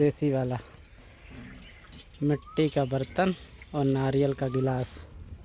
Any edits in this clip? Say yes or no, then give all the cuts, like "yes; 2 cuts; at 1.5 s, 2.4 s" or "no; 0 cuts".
no; 0 cuts